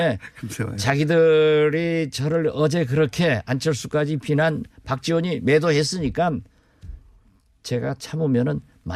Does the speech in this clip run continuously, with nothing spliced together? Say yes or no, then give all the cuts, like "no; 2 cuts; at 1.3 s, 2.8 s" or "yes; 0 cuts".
yes; 0 cuts